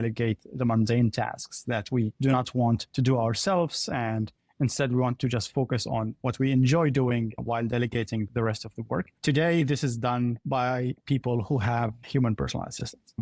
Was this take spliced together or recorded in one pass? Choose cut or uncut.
cut